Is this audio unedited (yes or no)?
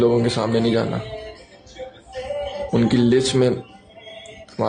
yes